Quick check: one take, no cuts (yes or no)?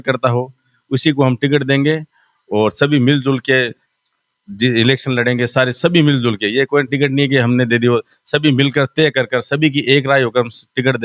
yes